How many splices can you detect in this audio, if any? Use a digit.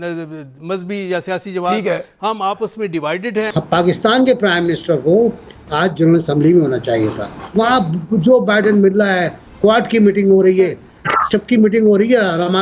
2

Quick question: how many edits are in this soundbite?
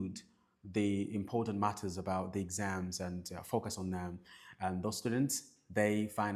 1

